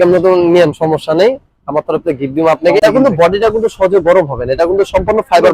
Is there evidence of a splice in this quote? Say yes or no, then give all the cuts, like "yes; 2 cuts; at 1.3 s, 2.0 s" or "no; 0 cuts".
yes; 1 cut; at 2.8 s